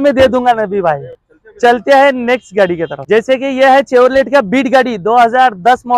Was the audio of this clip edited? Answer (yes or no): no